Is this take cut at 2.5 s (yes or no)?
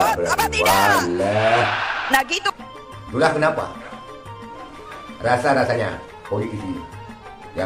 yes